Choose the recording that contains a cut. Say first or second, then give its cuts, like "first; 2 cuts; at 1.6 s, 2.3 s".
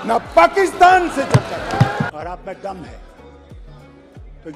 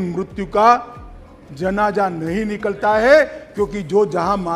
first; 1 cut; at 2.1 s